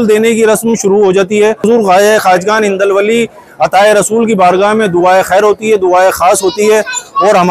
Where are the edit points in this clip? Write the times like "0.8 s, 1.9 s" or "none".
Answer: 1.6 s